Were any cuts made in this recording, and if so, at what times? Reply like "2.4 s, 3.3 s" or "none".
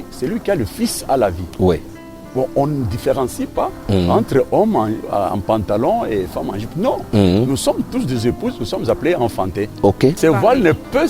10.2 s